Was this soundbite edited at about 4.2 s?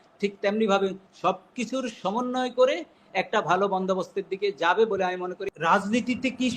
no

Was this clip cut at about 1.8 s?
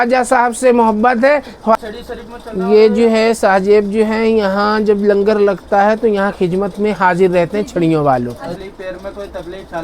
yes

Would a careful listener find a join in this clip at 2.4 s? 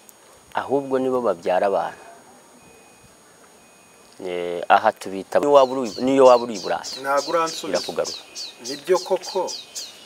no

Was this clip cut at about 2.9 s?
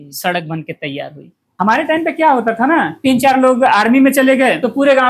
yes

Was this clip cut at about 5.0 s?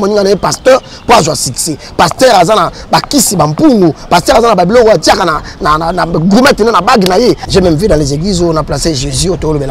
no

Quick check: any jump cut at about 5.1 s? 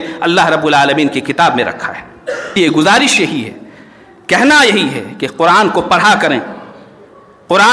no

